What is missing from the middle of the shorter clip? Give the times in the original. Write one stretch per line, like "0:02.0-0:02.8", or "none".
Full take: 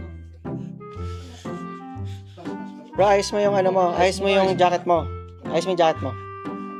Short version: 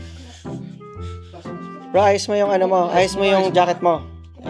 0:01.9-0:02.9